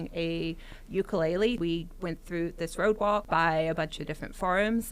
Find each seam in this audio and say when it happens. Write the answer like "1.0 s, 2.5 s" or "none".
1.6 s, 3.2 s